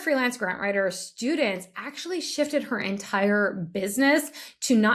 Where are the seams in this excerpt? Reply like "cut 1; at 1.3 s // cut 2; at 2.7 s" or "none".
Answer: none